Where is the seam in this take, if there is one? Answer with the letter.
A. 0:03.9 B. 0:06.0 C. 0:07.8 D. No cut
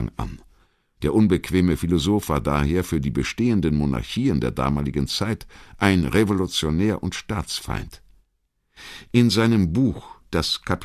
C